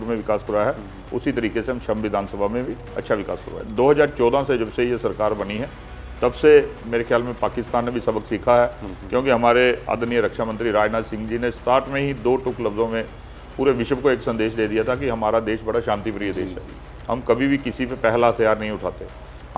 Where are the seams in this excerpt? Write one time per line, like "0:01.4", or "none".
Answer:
0:03.5